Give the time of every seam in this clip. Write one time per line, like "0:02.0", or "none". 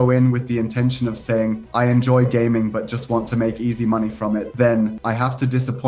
none